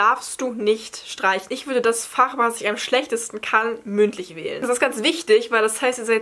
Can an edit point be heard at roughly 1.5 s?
yes; 2 cuts; at 1.5 s, 4.5 s

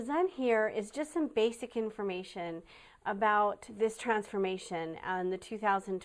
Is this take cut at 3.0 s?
no; 1 cut; at 4.2 s

